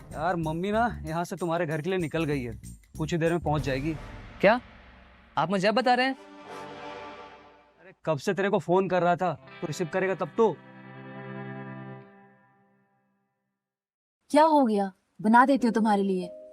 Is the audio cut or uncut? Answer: uncut